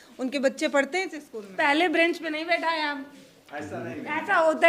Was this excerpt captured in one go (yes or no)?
no